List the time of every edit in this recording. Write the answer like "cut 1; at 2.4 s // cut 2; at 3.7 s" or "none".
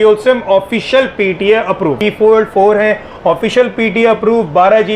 cut 1; at 2.0 s